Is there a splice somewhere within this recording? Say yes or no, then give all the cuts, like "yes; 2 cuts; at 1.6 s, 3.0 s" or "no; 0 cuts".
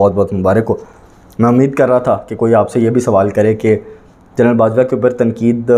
no; 0 cuts